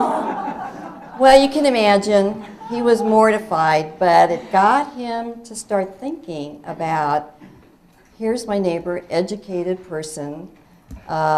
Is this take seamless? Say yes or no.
no